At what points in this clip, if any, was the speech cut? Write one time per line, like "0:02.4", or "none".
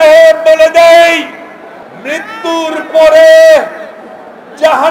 0:01.8